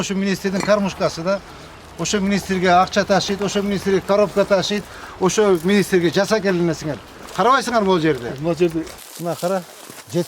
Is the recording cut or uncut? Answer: cut